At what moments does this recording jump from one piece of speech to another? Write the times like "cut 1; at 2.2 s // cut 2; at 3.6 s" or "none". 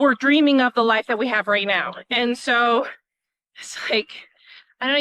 none